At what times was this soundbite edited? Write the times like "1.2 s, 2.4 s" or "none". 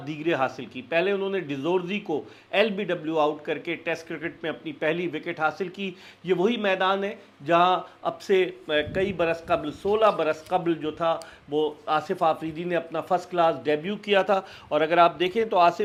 none